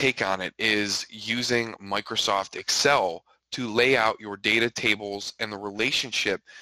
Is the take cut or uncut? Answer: uncut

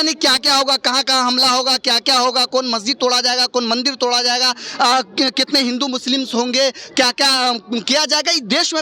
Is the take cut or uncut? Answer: uncut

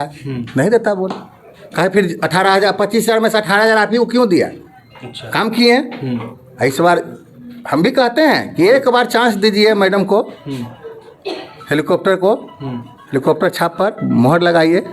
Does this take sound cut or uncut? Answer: uncut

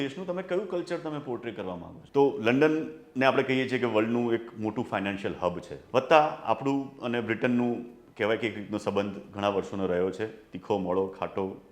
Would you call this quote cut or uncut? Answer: cut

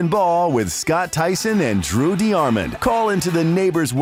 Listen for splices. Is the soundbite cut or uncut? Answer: uncut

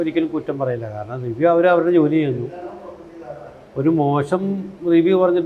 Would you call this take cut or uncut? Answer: uncut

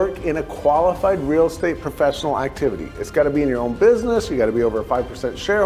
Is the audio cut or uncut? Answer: uncut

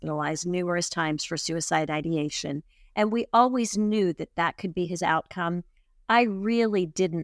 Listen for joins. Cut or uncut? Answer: uncut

